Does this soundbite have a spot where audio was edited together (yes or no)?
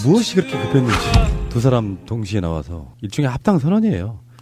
no